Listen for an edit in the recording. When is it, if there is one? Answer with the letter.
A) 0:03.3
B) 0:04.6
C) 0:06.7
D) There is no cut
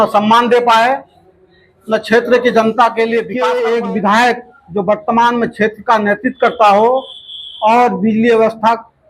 A